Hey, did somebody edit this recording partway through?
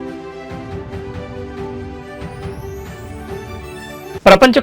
yes; 1 cut; at 3.6 s

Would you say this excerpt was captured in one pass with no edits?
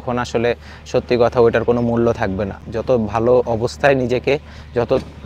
yes; 0 cuts

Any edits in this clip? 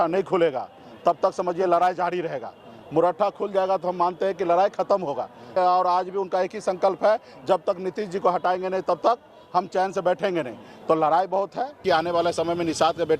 yes; 2 cuts; at 5.5 s, 11.8 s

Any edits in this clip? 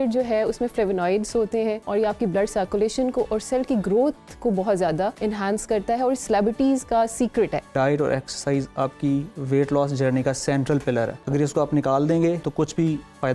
yes; 5 cuts; at 1.8 s, 5.2 s, 7.7 s, 11.2 s, 12.4 s

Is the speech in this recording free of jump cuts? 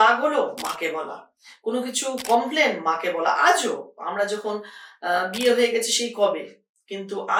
yes; 0 cuts

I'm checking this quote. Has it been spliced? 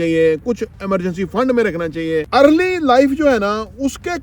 yes; 1 cut; at 2.3 s

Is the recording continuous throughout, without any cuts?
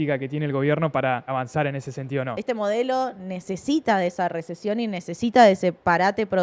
no; 2 cuts; at 1.3 s, 2.3 s

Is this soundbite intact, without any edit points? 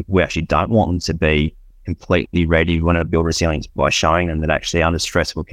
yes; 0 cuts

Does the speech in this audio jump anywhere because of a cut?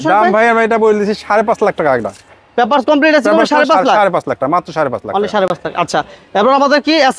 no; 0 cuts

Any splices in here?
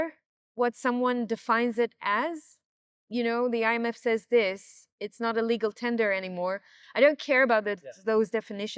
yes; 1 cut; at 6.8 s

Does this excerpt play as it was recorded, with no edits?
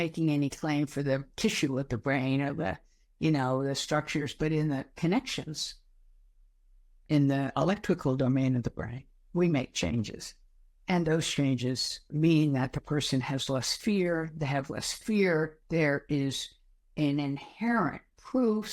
no; 2 cuts; at 7.0 s, 12.1 s

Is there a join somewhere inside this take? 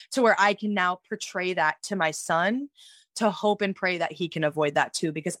no; 0 cuts

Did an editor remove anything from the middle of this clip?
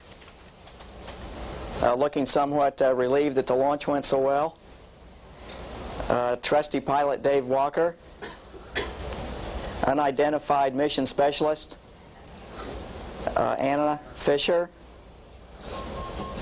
no; 0 cuts

